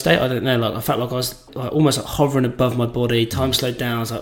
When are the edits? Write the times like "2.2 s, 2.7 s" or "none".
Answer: 1.5 s